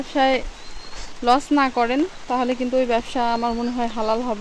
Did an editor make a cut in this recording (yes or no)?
no